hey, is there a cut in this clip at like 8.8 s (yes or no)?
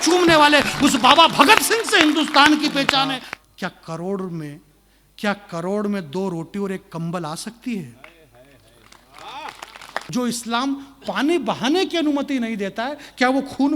no